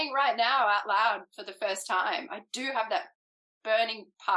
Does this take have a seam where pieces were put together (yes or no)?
no